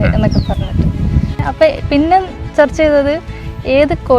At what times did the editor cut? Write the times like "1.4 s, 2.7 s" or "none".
1.4 s